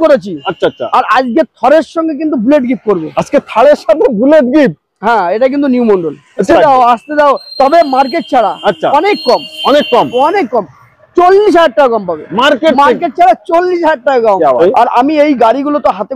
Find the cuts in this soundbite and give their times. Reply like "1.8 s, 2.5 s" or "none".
6.5 s, 14.6 s